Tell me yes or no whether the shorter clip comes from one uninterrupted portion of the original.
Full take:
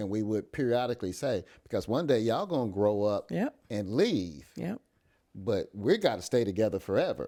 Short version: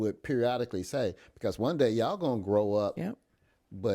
no